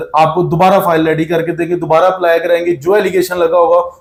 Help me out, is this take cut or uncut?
uncut